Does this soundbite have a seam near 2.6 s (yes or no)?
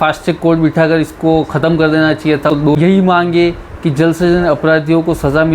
yes